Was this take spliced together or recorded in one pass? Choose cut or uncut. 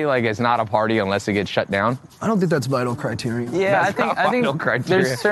cut